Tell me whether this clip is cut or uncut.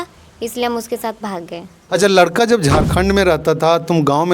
cut